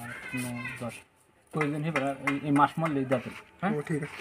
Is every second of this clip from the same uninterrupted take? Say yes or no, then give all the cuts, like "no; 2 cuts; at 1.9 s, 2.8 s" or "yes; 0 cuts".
yes; 0 cuts